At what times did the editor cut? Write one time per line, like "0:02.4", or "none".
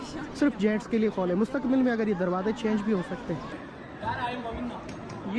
0:03.5